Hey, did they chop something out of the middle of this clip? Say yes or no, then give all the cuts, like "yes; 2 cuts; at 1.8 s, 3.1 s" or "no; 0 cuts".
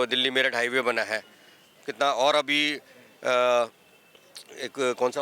no; 0 cuts